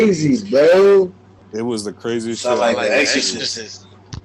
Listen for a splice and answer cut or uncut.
uncut